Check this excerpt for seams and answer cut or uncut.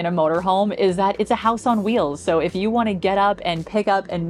uncut